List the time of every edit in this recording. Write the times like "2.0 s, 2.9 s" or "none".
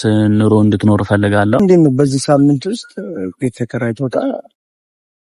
1.6 s